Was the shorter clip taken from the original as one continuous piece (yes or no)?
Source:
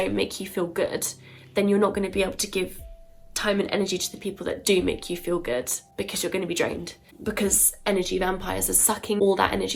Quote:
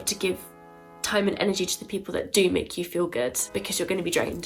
no